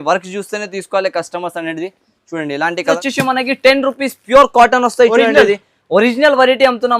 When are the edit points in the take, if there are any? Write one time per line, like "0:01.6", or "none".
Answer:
0:02.9

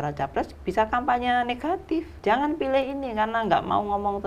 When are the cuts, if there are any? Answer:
0:02.1

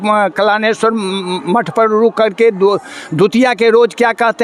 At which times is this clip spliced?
none

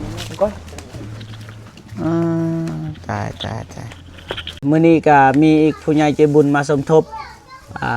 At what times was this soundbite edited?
0:04.6

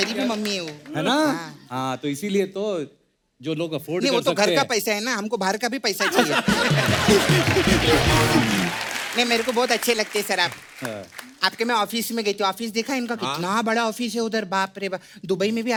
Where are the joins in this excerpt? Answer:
none

